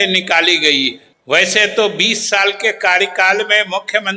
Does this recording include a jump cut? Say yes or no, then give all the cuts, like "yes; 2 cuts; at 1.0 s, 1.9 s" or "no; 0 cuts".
yes; 1 cut; at 1.1 s